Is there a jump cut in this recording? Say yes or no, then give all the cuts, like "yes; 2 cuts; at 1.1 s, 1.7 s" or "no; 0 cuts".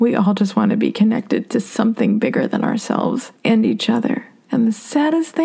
yes; 2 cuts; at 3.3 s, 4.3 s